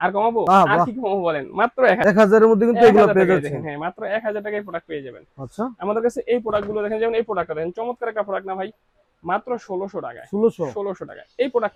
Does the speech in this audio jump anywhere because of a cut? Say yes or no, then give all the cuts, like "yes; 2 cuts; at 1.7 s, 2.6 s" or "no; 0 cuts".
no; 0 cuts